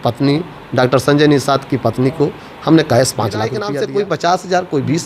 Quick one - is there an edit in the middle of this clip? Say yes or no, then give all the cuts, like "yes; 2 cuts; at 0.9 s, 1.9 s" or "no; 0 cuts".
yes; 1 cut; at 3.6 s